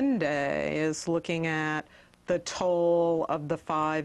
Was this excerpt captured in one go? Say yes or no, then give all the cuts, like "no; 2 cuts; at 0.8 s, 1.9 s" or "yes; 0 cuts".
yes; 0 cuts